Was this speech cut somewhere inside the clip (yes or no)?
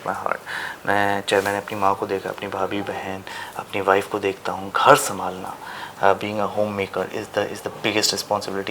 no